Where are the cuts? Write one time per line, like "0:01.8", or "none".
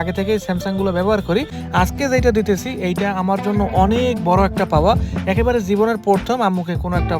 0:01.6